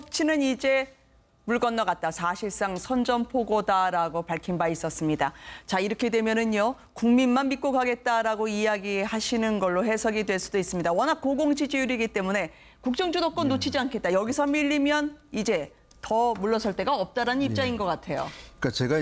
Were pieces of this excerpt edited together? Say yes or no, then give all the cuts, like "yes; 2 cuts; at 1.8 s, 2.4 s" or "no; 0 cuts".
no; 0 cuts